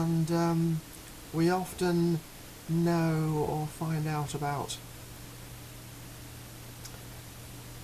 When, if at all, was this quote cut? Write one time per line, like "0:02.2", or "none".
0:05.7